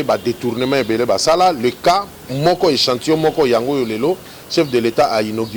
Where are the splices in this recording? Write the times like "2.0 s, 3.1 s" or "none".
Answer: none